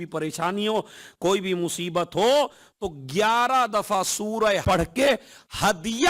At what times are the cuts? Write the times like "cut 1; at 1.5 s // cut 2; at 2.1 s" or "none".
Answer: cut 1; at 4.6 s